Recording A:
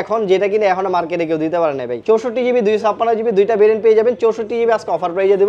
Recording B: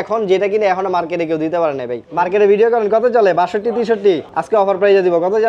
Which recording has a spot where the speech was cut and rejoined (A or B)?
B